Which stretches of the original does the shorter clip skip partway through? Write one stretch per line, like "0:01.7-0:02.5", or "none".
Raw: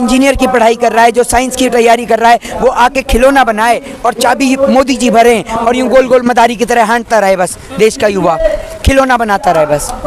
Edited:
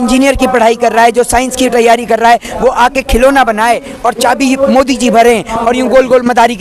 none